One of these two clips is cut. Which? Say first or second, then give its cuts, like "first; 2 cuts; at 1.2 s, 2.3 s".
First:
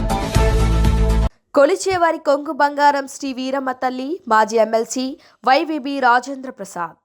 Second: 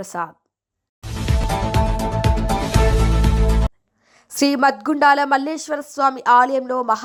first; 1 cut; at 1.1 s